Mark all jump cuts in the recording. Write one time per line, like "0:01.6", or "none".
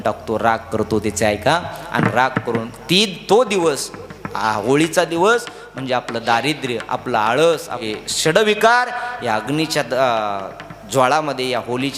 0:07.8